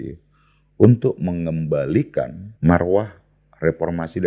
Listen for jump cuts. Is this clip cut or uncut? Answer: cut